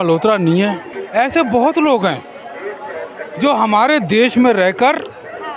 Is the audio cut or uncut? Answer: cut